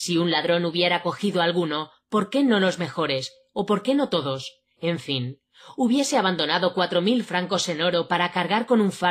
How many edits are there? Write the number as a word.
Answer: one